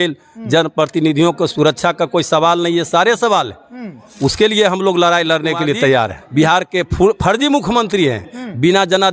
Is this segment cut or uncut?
cut